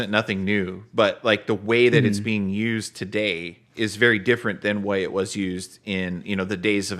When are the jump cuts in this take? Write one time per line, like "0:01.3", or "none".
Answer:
0:03.6